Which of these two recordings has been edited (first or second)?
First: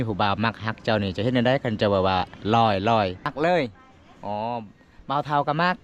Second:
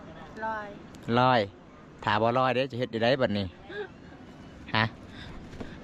first